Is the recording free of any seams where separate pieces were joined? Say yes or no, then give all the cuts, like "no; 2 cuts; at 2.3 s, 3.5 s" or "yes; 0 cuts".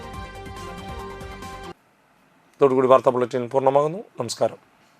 yes; 0 cuts